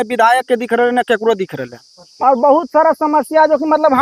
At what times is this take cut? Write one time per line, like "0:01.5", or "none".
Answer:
0:02.0

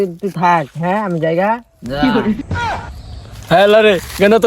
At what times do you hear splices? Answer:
0:02.5

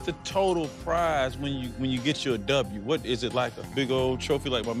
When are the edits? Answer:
none

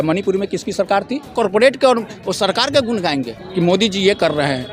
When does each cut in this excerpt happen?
0:01.3

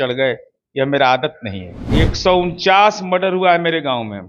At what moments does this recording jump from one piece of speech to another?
0:01.8

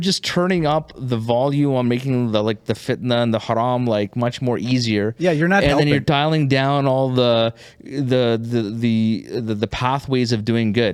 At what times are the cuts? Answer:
none

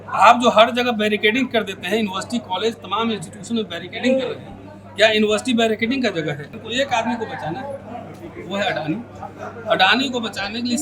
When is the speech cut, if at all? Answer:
0:06.6

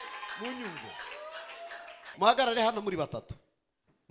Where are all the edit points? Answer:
0:02.1

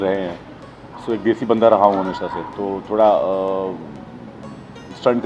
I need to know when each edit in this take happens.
none

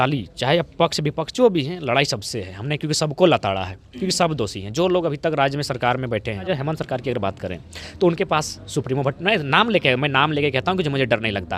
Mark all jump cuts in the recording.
0:06.5

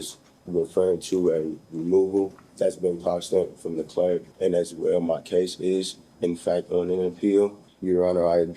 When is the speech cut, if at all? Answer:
0:02.4
0:04.3
0:07.7

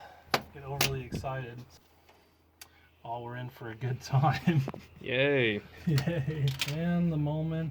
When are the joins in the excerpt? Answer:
0:01.7
0:06.6

